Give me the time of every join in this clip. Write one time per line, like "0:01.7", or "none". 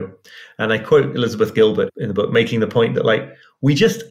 0:01.9